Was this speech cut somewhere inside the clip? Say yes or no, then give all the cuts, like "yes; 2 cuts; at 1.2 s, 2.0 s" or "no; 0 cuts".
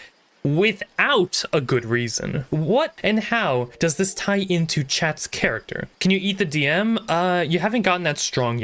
no; 0 cuts